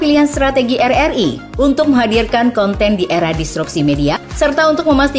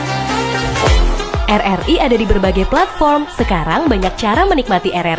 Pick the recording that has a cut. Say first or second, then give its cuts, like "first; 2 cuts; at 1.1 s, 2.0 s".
first; 1 cut; at 4.3 s